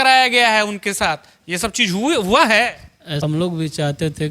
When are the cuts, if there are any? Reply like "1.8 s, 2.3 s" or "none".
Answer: 3.2 s